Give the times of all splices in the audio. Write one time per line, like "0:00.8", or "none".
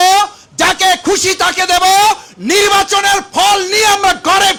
none